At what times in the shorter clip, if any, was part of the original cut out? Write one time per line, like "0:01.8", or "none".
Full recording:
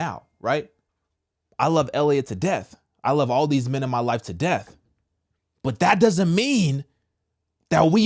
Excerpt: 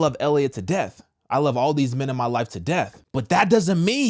0:03.0